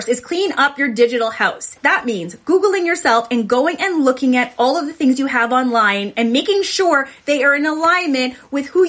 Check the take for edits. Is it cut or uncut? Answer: cut